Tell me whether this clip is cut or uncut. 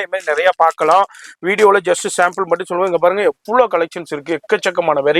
uncut